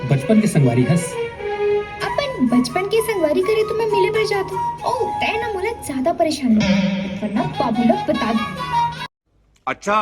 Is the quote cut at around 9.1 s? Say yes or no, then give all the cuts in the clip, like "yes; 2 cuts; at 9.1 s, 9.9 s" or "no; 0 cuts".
yes; 1 cut; at 9.1 s